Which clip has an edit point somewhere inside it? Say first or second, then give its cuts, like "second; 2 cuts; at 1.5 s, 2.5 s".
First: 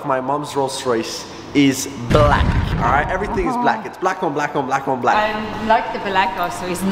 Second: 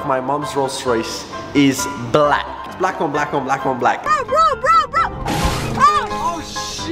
second; 2 cuts; at 2.6 s, 3.9 s